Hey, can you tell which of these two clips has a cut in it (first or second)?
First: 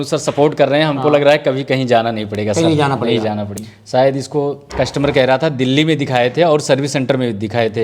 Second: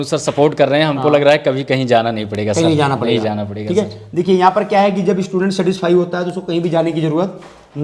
first